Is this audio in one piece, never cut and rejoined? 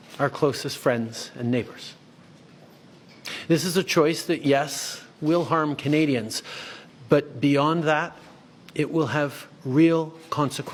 yes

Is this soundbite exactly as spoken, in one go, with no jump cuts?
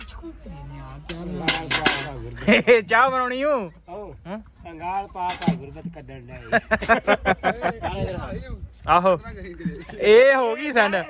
yes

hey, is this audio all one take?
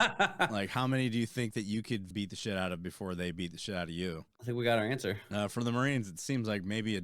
no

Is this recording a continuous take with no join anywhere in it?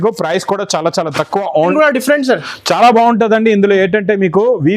no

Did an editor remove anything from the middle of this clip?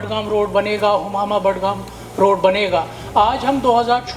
no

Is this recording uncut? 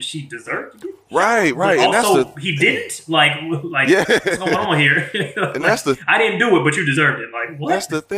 yes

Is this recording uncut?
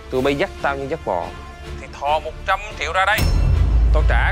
yes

